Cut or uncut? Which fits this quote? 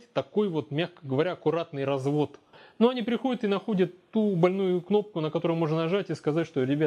cut